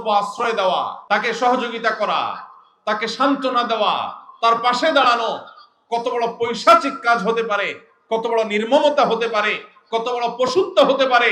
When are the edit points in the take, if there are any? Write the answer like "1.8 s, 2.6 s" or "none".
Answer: 1.0 s